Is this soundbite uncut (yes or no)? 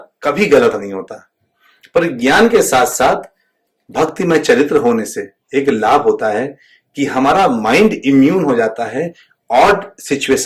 yes